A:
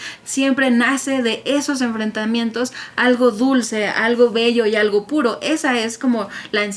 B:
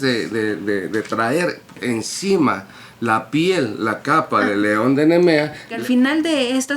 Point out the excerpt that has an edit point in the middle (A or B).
B